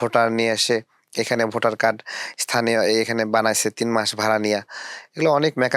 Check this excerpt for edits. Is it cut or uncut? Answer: uncut